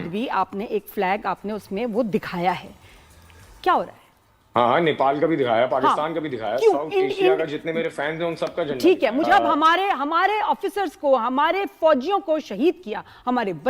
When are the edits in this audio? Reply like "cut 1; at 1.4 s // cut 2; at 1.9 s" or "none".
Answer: cut 1; at 9.2 s

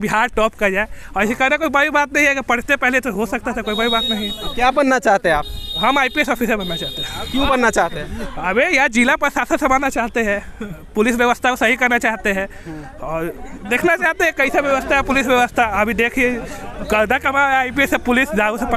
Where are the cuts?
none

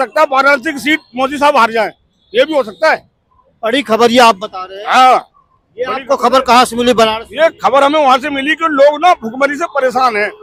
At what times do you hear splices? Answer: none

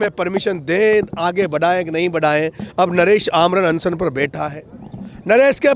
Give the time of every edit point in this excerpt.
none

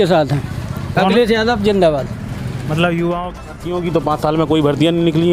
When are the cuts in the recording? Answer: cut 1; at 3.4 s

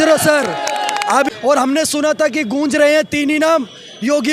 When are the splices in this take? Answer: cut 1; at 1.3 s

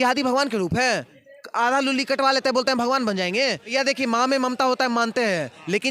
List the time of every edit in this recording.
cut 1; at 3.6 s

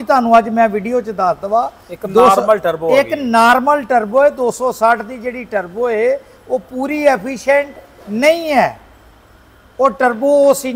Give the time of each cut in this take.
none

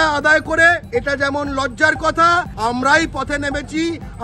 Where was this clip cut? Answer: cut 1; at 0.8 s // cut 2; at 2.5 s

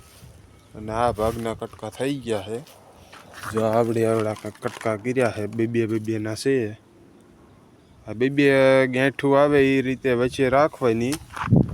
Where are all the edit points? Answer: none

